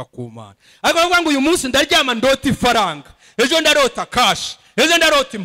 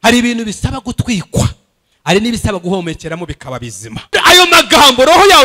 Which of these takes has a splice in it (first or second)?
second